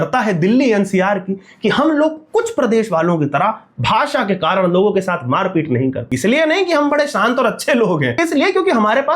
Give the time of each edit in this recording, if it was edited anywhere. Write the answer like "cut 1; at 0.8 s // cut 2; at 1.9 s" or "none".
cut 1; at 6.1 s // cut 2; at 8.2 s